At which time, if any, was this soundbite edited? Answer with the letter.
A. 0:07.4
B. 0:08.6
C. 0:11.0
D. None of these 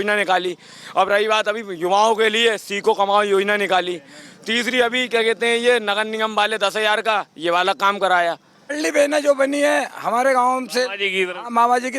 B